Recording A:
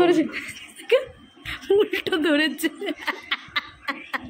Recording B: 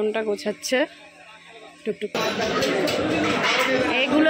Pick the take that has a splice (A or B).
B